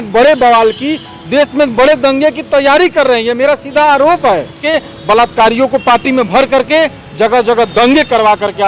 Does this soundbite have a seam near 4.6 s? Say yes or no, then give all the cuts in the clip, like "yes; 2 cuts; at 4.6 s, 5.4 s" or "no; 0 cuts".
yes; 1 cut; at 4.6 s